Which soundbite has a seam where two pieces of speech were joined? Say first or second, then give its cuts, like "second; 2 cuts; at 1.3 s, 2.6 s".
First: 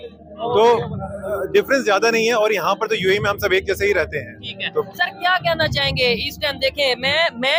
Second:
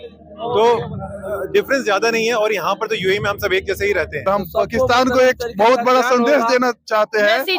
second; 1 cut; at 4.3 s